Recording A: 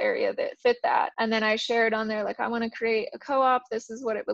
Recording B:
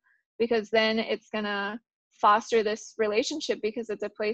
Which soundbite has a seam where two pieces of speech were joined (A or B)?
A